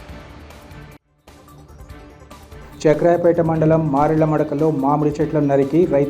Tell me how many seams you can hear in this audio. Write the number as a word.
one